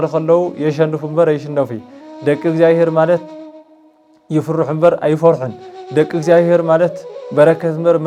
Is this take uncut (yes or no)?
yes